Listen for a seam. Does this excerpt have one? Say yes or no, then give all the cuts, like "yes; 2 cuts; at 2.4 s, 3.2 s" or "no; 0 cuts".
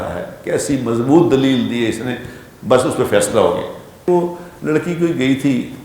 yes; 1 cut; at 4.1 s